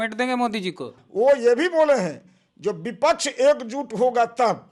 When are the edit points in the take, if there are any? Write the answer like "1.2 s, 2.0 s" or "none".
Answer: 0.9 s